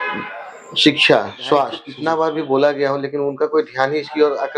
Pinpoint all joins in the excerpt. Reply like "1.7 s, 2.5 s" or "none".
1.8 s